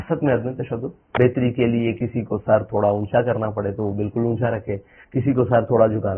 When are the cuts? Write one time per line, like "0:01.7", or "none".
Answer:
0:01.1